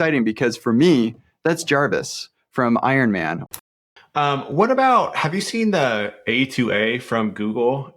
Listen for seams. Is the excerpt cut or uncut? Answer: cut